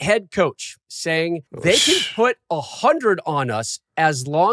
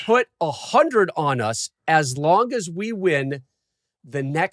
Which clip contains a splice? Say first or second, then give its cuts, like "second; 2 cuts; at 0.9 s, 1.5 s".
first; 1 cut; at 1.1 s